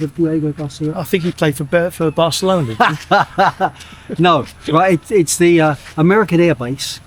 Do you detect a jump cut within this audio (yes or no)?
no